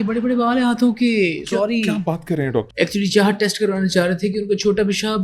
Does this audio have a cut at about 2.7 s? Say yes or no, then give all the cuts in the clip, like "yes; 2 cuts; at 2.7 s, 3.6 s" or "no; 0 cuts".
yes; 1 cut; at 2.7 s